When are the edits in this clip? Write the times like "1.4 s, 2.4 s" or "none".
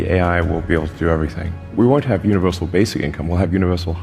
1.7 s